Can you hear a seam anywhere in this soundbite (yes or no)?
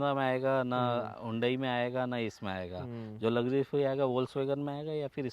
no